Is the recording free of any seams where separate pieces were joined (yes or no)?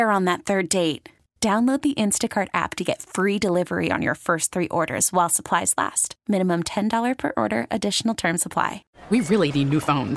no